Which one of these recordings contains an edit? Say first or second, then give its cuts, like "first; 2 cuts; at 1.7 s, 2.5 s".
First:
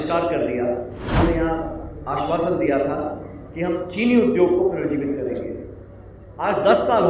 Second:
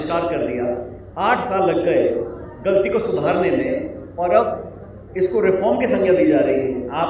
first; 1 cut; at 1.2 s